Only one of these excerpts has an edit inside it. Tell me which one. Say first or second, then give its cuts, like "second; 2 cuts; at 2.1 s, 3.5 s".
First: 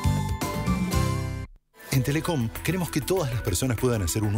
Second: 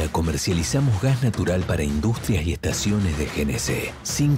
first; 1 cut; at 1.5 s